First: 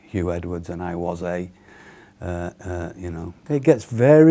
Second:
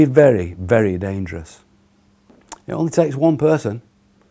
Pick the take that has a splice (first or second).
first